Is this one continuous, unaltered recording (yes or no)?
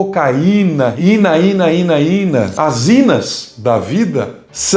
no